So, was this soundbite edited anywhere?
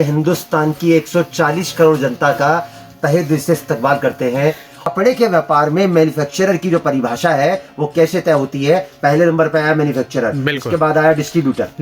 yes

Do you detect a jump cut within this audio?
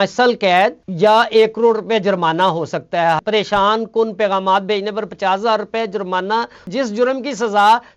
yes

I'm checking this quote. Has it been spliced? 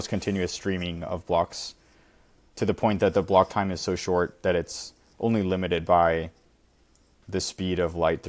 no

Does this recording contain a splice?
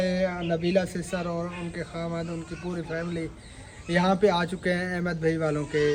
no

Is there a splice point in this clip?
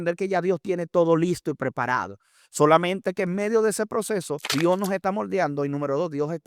yes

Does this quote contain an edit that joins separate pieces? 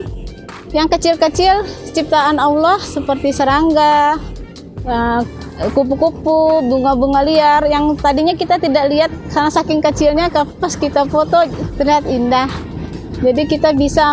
no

